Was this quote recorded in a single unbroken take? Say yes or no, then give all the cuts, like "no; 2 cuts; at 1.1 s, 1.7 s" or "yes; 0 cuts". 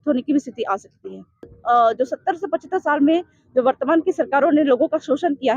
no; 1 cut; at 1.6 s